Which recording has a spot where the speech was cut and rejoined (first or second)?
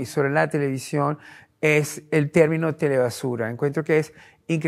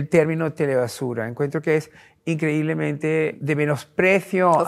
second